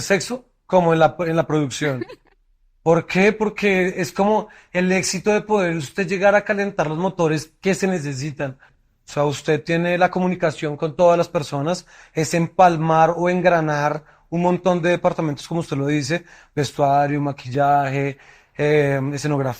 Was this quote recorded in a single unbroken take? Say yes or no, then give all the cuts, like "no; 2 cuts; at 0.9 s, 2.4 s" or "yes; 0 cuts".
yes; 0 cuts